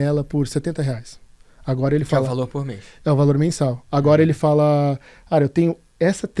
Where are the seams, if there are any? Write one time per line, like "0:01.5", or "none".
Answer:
none